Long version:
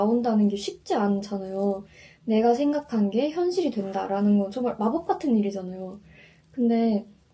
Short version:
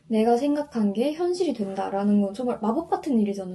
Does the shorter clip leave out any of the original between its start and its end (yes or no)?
no